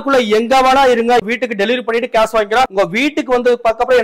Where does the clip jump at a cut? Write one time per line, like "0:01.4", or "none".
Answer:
0:01.2
0:02.7